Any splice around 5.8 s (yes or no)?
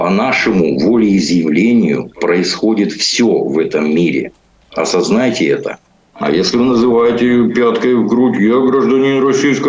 yes